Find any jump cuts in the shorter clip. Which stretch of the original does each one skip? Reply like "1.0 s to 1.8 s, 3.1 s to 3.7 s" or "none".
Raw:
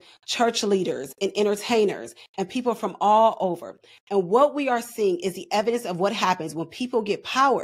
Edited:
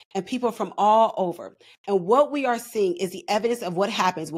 none